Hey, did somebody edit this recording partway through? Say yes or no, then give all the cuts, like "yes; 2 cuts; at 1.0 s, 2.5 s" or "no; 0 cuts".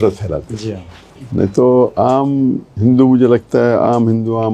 no; 0 cuts